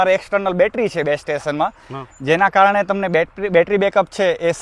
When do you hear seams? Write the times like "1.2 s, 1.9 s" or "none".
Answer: none